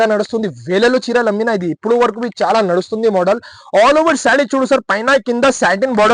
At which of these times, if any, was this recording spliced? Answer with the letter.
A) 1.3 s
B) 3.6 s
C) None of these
C